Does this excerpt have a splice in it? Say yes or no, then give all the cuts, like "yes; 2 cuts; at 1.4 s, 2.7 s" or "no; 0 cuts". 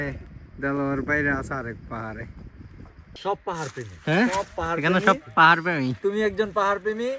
yes; 1 cut; at 3.0 s